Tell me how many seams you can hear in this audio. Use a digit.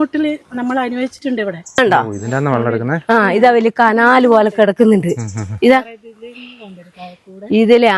1